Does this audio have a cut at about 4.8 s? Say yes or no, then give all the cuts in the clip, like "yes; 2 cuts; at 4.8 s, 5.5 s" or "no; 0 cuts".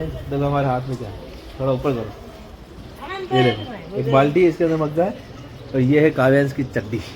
no; 0 cuts